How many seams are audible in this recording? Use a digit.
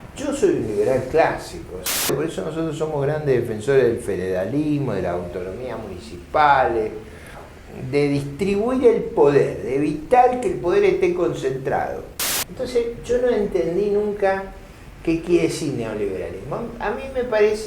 2